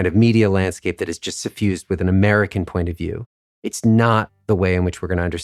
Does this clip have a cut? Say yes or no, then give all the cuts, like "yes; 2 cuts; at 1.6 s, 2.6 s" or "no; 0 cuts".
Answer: no; 0 cuts